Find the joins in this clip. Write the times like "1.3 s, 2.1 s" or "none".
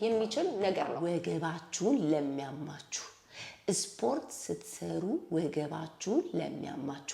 1.0 s